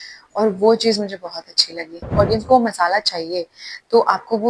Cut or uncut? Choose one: cut